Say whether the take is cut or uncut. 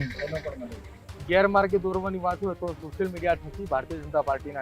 cut